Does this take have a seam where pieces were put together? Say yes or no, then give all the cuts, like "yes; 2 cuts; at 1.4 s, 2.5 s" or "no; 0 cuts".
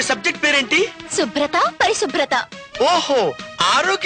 no; 0 cuts